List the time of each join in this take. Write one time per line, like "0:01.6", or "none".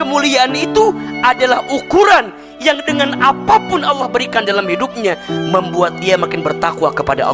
none